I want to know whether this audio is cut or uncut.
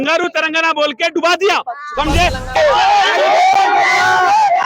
cut